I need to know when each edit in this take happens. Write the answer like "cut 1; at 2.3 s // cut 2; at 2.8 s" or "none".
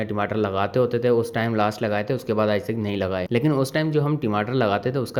none